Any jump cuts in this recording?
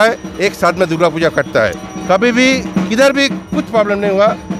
no; 0 cuts

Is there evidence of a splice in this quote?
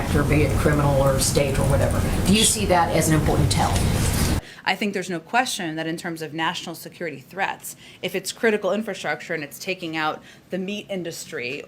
yes; 1 cut; at 4.4 s

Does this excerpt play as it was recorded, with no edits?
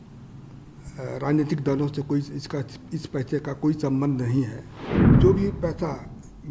no; 1 cut; at 5.1 s

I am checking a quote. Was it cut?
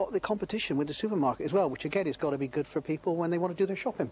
no; 0 cuts

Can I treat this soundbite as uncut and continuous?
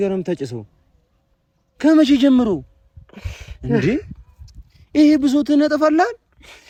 yes; 0 cuts

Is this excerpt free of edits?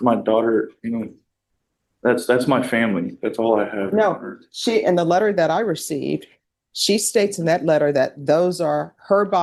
yes; 0 cuts

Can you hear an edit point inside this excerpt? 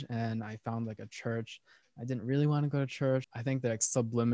yes; 1 cut; at 3.3 s

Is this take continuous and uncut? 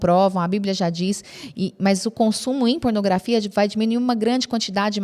yes; 0 cuts

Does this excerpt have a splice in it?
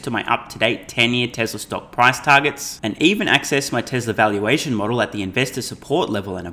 no; 0 cuts

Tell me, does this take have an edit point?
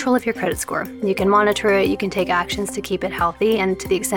no; 0 cuts

